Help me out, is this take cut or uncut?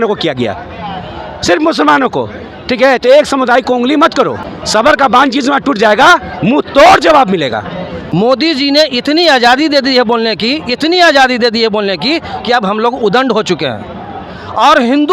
cut